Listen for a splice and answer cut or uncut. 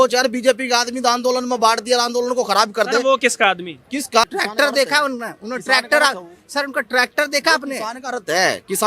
cut